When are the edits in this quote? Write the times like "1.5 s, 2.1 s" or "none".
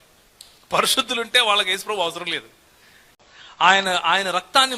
3.1 s